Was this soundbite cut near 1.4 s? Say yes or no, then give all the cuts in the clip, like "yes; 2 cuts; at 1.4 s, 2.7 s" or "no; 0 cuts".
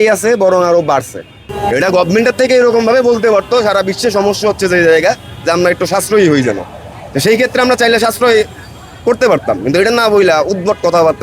yes; 1 cut; at 1.4 s